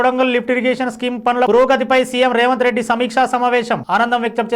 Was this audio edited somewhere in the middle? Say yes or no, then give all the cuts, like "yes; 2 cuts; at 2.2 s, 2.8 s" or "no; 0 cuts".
no; 0 cuts